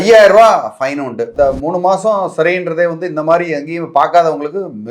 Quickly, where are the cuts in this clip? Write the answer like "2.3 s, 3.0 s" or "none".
1.3 s